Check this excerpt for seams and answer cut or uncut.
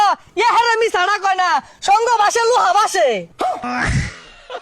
cut